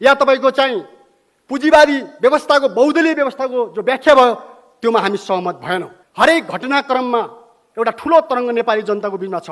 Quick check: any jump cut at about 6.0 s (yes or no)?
yes